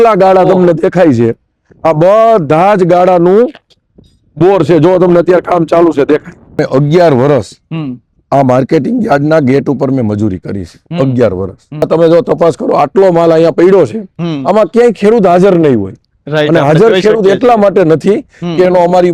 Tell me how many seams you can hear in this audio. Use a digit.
2